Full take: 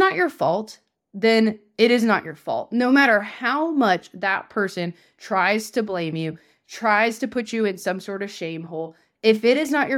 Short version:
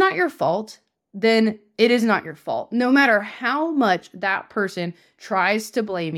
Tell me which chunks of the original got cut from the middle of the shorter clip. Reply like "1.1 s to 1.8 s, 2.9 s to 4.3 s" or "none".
none